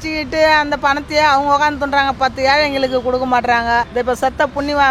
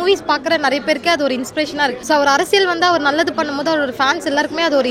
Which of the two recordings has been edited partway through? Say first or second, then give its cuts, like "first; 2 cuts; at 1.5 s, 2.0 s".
second; 1 cut; at 2.0 s